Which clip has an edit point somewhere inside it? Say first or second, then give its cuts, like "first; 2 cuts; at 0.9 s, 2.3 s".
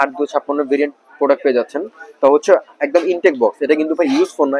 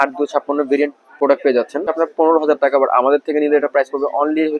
second; 1 cut; at 1.9 s